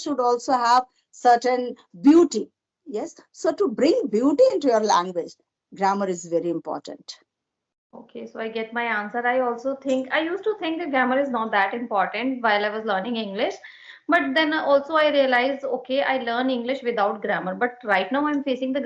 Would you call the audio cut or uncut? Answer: uncut